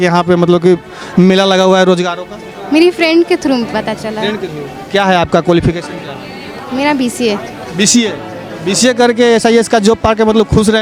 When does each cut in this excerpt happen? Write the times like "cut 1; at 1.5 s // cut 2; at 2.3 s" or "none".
none